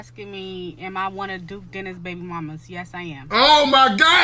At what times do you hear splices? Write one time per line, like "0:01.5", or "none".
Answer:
none